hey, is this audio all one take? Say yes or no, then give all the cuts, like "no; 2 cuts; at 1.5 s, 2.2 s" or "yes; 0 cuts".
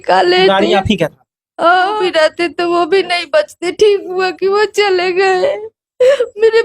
no; 1 cut; at 2.0 s